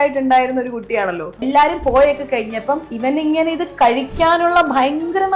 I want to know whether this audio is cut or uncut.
cut